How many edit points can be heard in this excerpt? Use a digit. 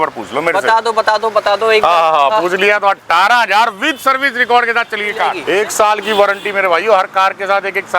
1